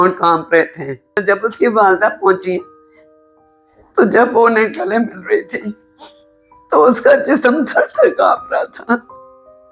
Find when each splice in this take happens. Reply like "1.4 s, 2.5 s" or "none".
1.2 s